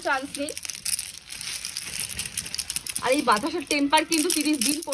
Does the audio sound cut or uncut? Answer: uncut